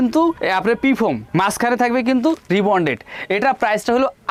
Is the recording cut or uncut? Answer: uncut